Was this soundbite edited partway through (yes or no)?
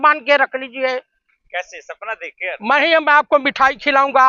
no